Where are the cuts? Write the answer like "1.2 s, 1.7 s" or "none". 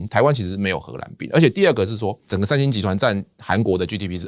2.2 s

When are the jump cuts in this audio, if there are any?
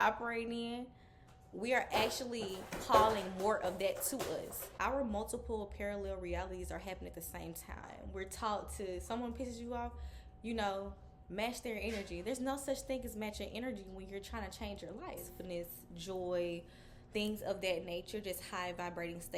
4.7 s, 7.9 s, 15.3 s

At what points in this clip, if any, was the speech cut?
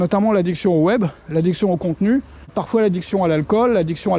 2.6 s

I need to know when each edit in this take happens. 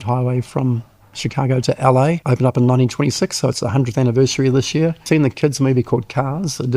2.2 s, 5.0 s

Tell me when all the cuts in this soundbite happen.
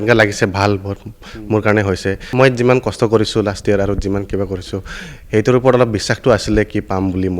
2.3 s

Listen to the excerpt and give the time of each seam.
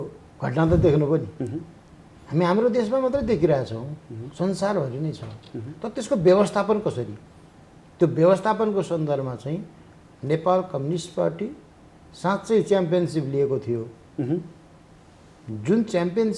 none

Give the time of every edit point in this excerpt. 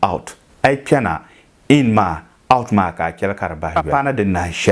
3.8 s

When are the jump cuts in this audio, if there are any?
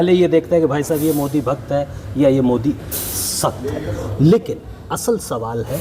none

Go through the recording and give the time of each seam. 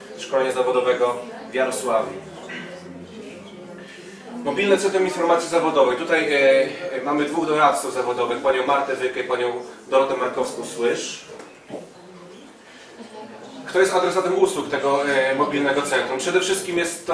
11.0 s

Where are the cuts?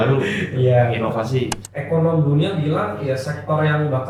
1.7 s

